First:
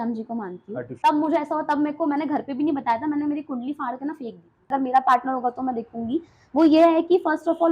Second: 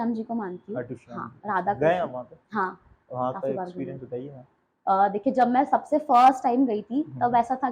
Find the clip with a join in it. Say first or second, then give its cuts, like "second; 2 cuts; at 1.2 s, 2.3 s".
first; 2 cuts; at 0.9 s, 4.7 s